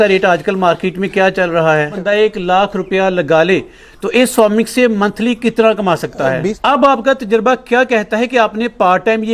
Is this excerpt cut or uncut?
cut